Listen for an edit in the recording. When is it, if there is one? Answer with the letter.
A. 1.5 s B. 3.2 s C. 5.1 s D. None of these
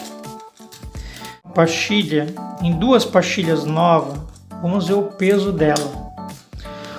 A